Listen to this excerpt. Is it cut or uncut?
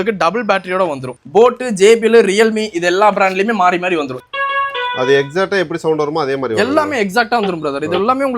cut